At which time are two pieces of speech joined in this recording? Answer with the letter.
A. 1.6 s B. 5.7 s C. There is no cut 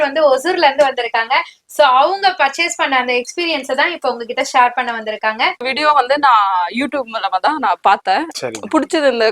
B